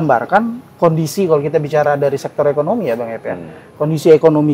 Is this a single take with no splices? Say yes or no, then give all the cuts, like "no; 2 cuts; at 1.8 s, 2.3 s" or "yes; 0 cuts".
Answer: yes; 0 cuts